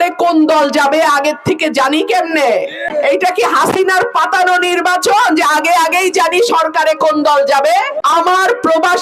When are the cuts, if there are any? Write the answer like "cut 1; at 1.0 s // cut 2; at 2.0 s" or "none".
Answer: cut 1; at 2.8 s // cut 2; at 7.9 s